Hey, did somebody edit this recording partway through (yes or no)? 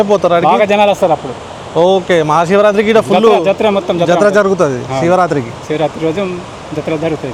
no